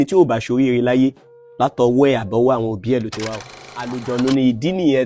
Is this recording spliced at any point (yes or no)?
yes